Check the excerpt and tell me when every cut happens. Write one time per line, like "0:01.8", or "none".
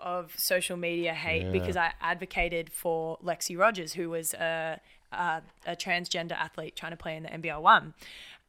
none